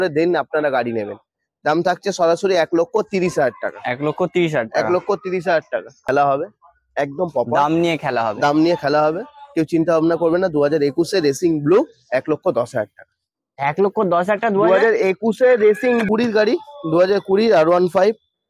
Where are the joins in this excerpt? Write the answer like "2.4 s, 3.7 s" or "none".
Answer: 6.0 s, 16.0 s